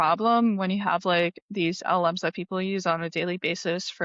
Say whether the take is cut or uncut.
uncut